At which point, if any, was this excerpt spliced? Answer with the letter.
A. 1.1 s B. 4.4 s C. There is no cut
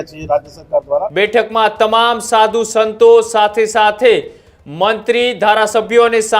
A